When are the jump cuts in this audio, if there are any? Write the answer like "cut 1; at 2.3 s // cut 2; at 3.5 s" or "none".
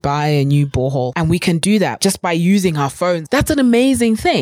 cut 1; at 1.1 s // cut 2; at 2.0 s // cut 3; at 3.2 s